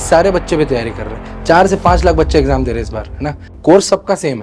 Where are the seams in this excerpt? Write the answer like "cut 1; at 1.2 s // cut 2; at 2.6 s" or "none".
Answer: cut 1; at 3.5 s